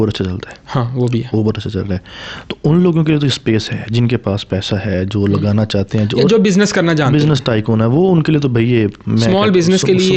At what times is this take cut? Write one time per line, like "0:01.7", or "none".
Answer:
none